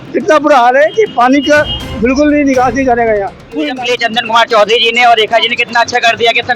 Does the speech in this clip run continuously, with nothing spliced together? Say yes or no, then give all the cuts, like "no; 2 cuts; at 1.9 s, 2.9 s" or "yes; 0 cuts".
no; 1 cut; at 3.7 s